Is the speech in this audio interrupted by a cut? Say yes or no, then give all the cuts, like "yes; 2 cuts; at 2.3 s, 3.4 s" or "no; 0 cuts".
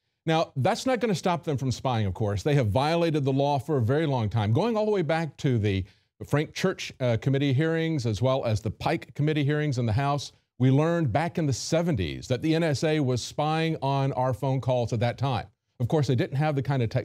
no; 0 cuts